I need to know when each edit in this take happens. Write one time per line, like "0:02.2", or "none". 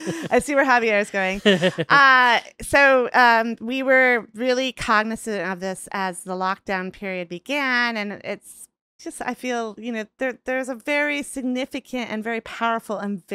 0:09.0